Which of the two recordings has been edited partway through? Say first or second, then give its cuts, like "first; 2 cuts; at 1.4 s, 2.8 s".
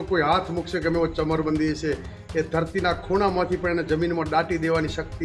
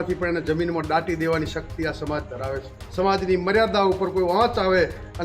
second; 1 cut; at 2.8 s